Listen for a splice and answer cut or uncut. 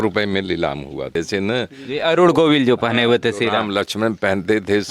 cut